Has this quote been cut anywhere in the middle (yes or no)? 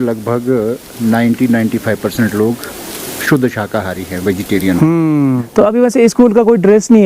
yes